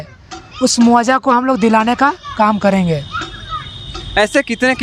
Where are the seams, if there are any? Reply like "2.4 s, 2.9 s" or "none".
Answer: none